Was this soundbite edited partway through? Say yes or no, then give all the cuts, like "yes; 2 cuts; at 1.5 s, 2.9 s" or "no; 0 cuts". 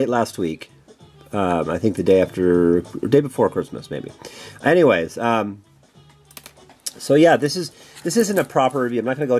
yes; 1 cut; at 3.2 s